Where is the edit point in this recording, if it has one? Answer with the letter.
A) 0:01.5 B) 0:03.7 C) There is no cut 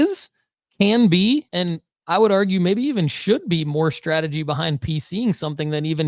A